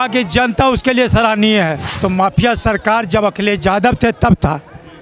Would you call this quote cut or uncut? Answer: cut